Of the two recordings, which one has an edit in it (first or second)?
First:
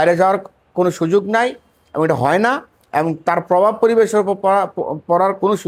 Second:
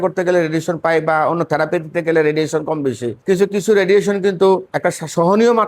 second